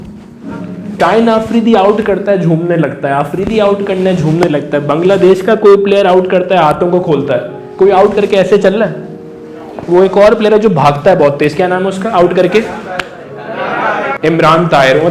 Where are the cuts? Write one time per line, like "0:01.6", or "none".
0:14.2